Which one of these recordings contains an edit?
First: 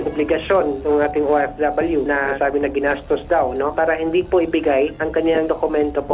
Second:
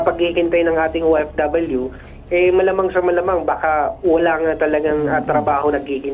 first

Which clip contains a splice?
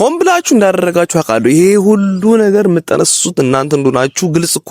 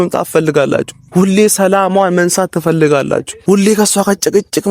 second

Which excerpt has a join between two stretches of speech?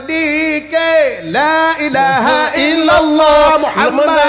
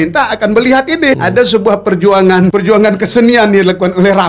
second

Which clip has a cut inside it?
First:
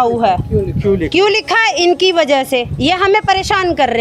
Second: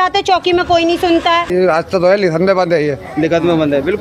second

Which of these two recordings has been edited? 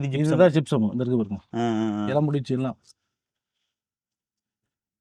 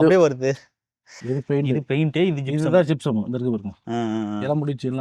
second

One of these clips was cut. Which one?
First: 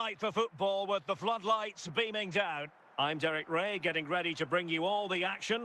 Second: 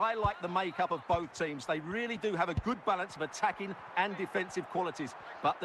first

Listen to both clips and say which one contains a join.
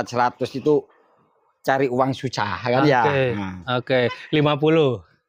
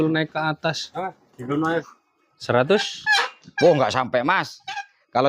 second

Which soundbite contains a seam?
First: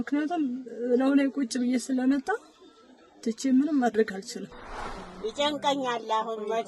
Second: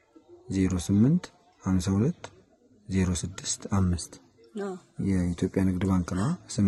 first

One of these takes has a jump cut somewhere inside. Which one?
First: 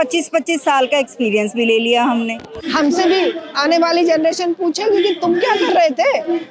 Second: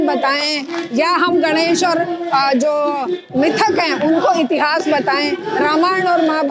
first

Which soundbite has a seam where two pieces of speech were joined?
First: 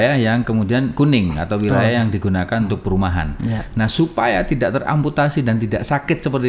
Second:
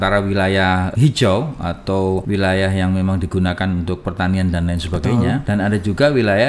second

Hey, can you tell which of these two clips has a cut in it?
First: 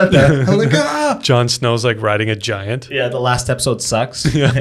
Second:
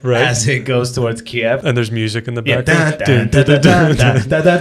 second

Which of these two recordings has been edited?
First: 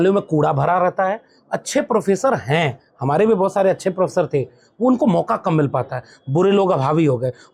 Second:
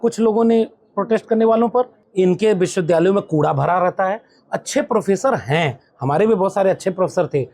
second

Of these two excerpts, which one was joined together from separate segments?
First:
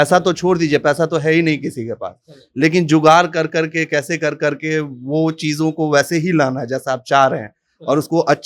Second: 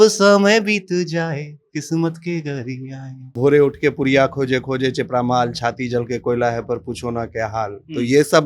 second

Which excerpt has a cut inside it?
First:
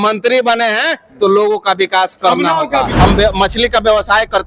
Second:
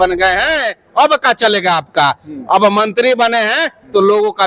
first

